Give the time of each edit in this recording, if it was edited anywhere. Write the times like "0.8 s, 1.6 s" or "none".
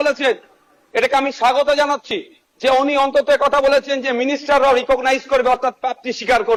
none